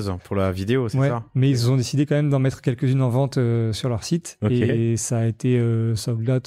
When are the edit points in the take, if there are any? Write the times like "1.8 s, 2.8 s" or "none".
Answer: none

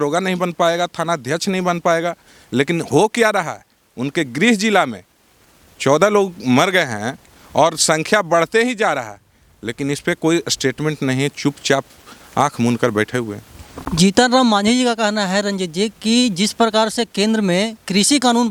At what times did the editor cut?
none

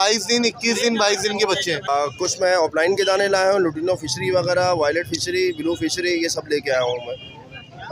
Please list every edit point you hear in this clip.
1.9 s

